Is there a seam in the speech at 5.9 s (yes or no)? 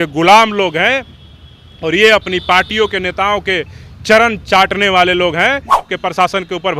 yes